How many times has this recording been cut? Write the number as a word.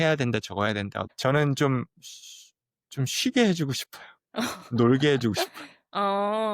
one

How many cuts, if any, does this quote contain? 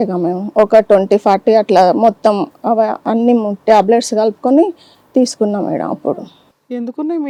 zero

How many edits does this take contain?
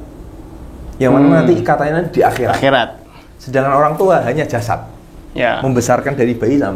zero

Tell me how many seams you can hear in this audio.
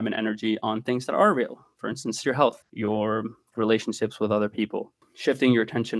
two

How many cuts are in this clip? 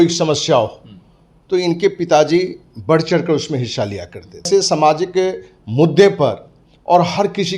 one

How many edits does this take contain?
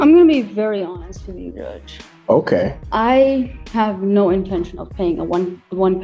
one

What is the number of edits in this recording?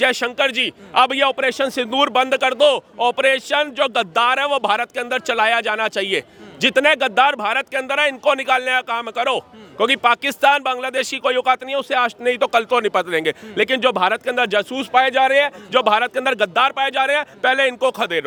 zero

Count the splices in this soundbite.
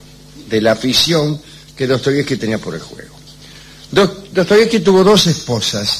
one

